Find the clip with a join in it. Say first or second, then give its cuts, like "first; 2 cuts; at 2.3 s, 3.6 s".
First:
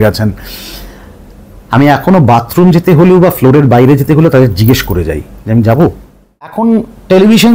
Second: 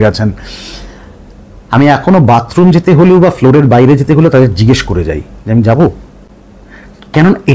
first; 1 cut; at 6.5 s